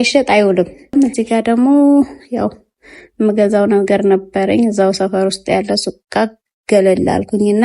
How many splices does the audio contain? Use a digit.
1